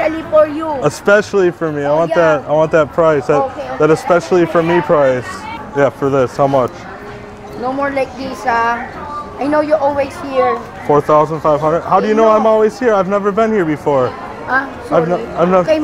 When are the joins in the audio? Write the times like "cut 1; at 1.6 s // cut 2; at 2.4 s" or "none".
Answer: none